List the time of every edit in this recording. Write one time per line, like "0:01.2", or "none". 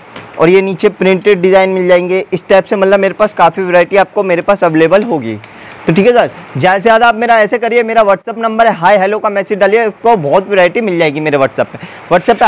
none